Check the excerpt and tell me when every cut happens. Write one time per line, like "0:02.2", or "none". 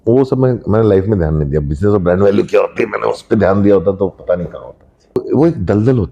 0:05.2